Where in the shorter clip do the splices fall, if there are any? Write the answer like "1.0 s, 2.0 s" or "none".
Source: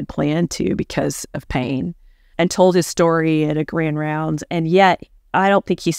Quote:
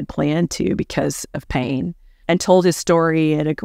2.1 s